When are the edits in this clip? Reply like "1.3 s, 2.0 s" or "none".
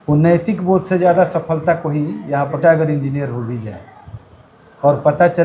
2.6 s